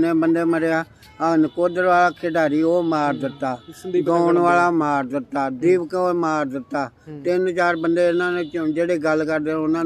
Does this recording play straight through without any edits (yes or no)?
yes